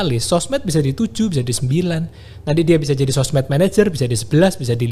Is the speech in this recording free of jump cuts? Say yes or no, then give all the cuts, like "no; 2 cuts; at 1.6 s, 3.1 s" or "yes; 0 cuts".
yes; 0 cuts